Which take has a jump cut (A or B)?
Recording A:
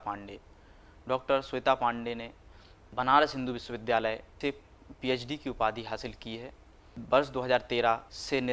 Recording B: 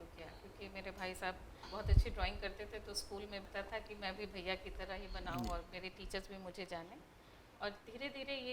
B